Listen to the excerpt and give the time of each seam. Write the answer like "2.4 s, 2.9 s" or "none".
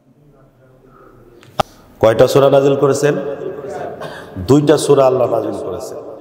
1.6 s